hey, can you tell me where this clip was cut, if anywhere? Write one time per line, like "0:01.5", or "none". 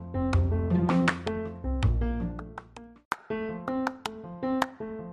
0:03.0